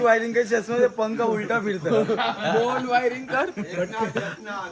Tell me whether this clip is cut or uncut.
uncut